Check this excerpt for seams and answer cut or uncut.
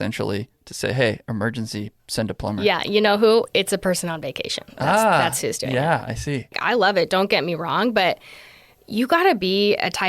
cut